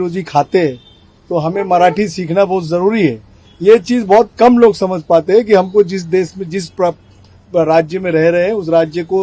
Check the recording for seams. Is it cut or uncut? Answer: uncut